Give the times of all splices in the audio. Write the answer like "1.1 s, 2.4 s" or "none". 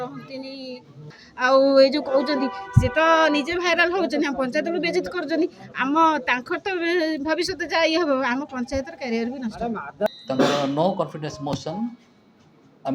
1.2 s, 10.1 s